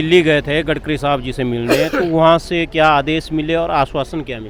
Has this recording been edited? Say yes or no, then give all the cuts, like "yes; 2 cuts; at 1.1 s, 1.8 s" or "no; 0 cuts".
no; 0 cuts